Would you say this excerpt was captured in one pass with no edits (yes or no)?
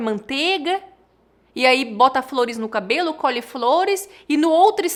yes